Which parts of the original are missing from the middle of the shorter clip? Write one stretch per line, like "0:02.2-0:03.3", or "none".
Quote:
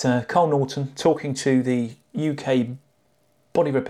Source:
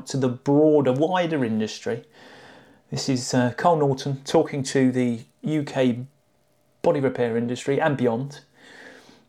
none